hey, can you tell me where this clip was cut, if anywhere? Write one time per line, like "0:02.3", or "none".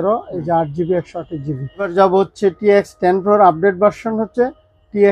0:01.9